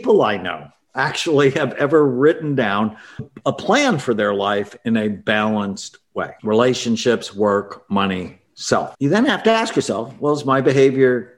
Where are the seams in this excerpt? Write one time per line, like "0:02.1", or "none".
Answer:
0:06.3
0:08.9

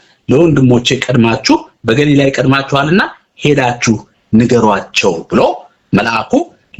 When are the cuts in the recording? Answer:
none

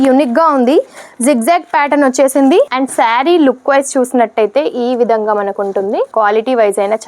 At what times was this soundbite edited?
0:02.7

